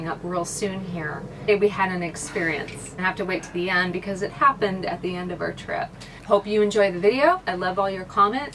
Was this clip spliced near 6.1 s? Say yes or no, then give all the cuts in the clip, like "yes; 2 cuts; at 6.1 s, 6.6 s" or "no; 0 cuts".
yes; 4 cuts; at 1.5 s, 3.0 s, 6.1 s, 7.4 s